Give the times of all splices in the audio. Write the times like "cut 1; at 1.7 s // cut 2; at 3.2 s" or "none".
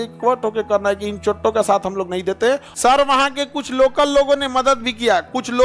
cut 1; at 2.7 s